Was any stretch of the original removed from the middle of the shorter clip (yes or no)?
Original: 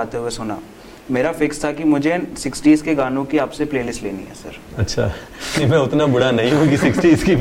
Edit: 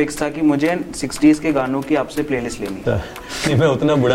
yes